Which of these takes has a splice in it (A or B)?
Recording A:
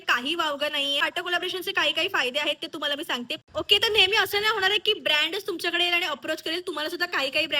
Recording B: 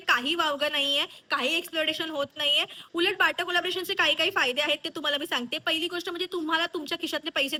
A